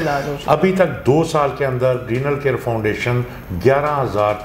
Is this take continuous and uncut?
yes; 0 cuts

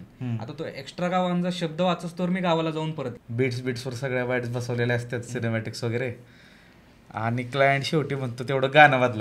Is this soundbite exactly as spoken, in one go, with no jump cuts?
no; 1 cut; at 3.2 s

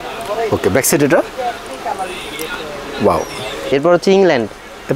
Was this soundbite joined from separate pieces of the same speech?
yes; 1 cut; at 3.6 s

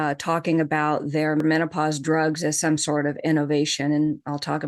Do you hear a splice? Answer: yes; 1 cut; at 1.4 s

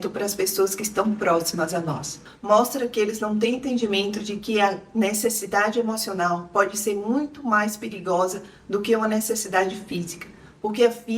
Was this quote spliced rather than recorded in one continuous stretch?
yes; 1 cut; at 2.2 s

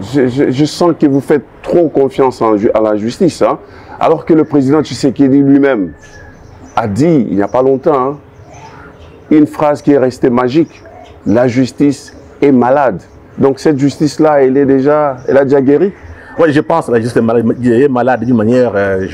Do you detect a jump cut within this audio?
no; 0 cuts

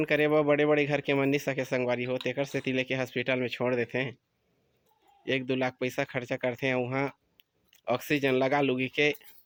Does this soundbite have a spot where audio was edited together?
no; 0 cuts

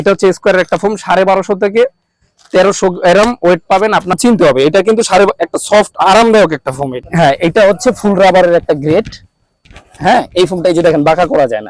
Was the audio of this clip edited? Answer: yes; 2 cuts; at 4.2 s, 7.0 s

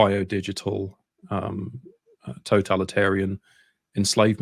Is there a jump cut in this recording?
no; 0 cuts

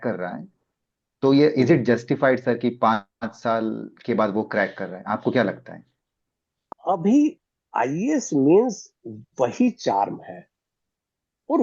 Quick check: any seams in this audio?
yes; 1 cut; at 6.7 s

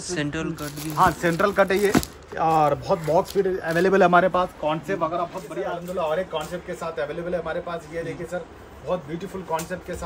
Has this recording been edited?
yes; 1 cut; at 5.6 s

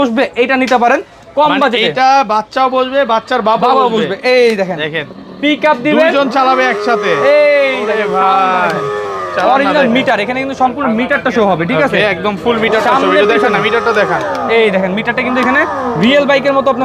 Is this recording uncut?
yes; 0 cuts

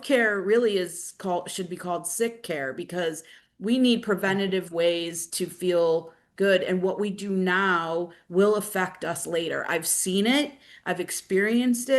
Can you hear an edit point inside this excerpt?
no; 0 cuts

